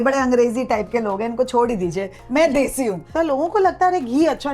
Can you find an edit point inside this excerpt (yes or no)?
yes